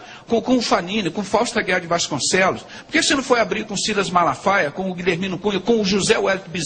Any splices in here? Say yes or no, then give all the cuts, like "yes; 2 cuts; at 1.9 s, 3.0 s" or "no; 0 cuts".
no; 0 cuts